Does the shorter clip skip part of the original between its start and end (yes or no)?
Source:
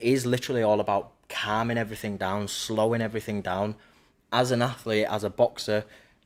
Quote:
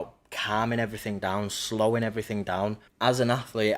yes